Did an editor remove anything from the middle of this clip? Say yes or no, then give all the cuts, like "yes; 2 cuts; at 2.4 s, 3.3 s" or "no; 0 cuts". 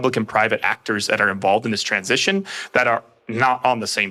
no; 0 cuts